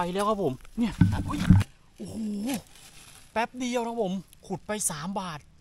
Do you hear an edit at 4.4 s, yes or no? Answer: no